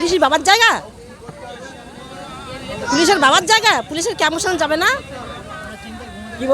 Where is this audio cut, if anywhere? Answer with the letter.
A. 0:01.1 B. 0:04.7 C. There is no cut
C